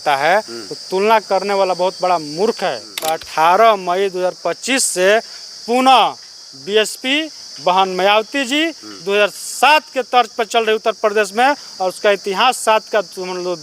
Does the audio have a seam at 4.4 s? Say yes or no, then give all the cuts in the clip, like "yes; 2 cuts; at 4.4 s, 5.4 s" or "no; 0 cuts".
no; 1 cut; at 2.9 s